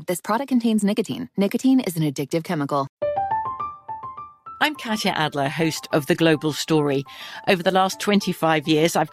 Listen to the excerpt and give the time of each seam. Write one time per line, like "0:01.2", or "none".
0:02.9